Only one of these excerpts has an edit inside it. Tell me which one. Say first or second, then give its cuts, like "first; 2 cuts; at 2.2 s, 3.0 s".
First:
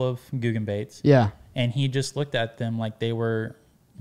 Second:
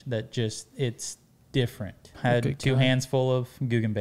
second; 1 cut; at 2.1 s